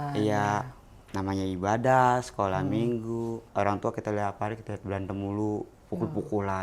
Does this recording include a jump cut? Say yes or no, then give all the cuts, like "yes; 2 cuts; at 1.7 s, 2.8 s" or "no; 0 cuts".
yes; 1 cut; at 3.5 s